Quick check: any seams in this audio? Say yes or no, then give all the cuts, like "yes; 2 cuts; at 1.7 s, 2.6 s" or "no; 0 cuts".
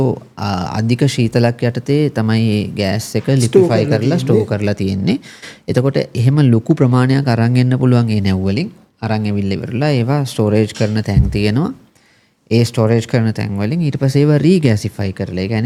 no; 0 cuts